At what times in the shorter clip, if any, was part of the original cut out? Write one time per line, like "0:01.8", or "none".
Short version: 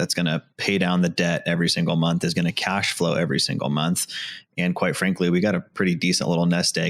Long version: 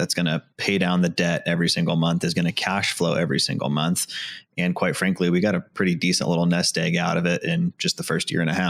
none